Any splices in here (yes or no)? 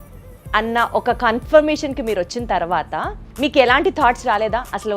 yes